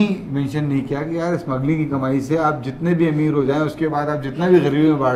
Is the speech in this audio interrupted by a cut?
no; 0 cuts

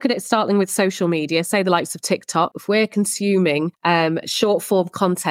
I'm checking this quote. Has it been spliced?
yes; 2 cuts; at 2.6 s, 3.7 s

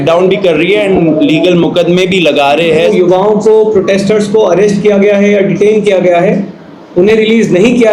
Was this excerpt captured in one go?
no; 1 cut; at 2.9 s

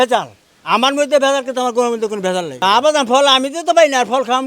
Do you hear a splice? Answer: yes; 1 cut; at 2.5 s

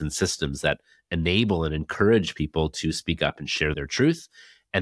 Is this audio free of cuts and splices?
yes; 0 cuts

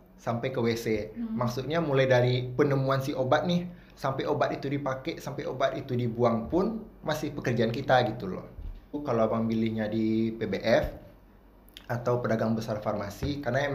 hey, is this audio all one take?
no; 1 cut; at 9.0 s

